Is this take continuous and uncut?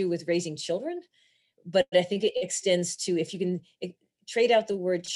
yes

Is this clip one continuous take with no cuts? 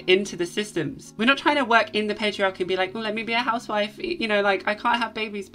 yes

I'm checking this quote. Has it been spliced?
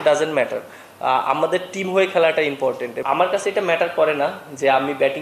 yes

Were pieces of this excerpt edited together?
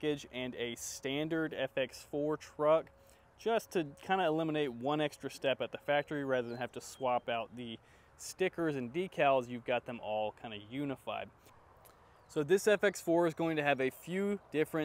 no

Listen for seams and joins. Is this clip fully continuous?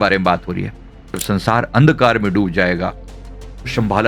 no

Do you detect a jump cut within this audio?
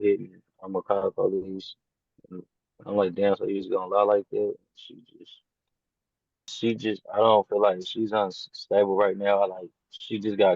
yes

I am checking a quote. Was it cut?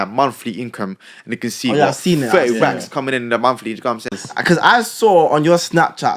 yes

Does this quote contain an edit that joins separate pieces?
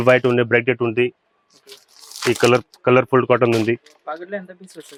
no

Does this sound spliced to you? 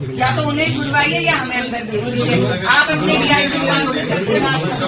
no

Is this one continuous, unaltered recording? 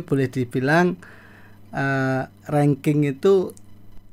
yes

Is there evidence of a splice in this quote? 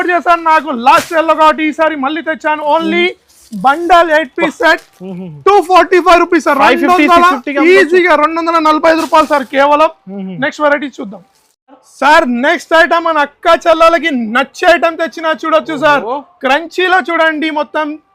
no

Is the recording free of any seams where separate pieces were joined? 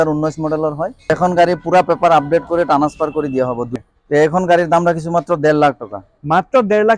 no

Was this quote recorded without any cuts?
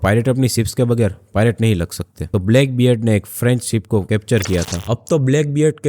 no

